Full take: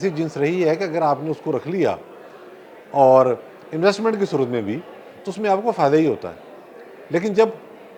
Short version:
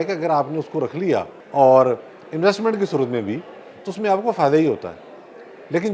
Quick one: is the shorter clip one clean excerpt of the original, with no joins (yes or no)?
no